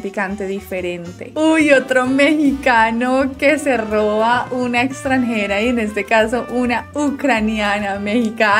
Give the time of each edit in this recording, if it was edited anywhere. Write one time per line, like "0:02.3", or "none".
0:01.3